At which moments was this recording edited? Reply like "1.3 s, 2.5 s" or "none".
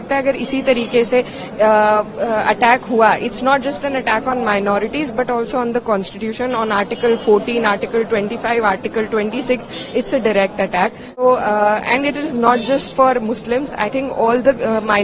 11.2 s